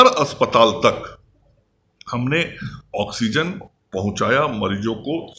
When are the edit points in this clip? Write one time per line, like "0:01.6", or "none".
none